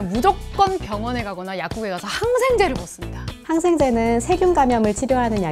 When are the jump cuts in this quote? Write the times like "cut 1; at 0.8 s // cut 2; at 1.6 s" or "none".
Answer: cut 1; at 3.3 s